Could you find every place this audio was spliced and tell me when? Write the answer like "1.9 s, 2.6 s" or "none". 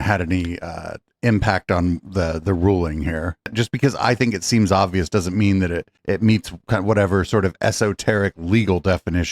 3.5 s